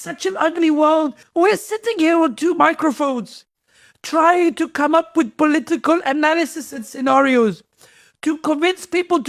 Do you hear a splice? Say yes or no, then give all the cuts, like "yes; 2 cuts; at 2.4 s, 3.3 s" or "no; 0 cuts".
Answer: yes; 1 cut; at 1.2 s